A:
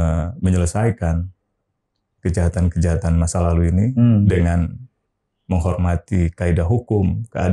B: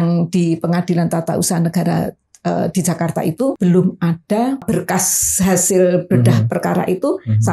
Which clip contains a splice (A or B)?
B